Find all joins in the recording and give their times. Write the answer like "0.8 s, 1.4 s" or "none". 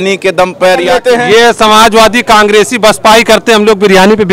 0.9 s